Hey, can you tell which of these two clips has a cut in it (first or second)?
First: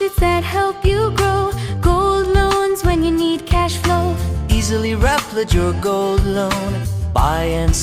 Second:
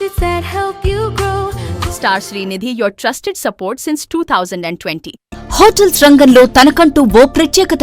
second